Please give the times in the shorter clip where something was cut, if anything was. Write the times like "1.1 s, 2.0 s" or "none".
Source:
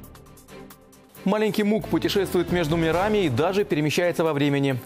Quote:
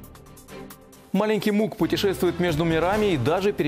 1.0 s